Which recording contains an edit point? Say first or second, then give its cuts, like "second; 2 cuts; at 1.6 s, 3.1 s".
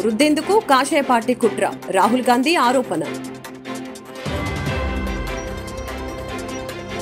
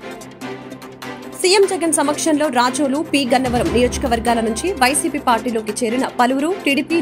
second; 1 cut; at 1.4 s